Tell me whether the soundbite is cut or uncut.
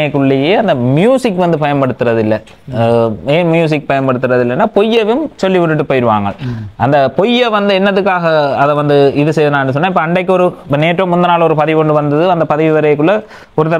uncut